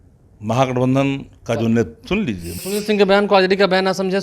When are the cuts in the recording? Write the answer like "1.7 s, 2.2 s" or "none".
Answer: 2.5 s